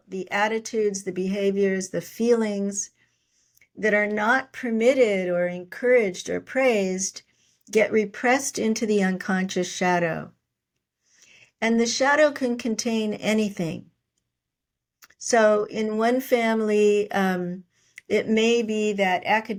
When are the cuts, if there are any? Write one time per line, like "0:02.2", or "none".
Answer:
none